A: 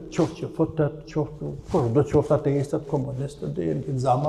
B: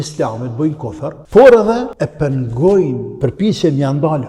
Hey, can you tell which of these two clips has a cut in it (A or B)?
B